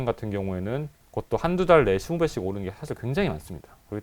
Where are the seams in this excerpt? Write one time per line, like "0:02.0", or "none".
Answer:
0:01.0